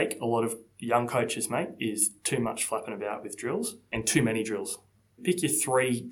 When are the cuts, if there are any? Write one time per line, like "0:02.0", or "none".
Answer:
0:03.9
0:05.2